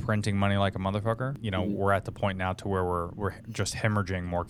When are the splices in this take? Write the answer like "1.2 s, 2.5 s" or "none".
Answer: 1.3 s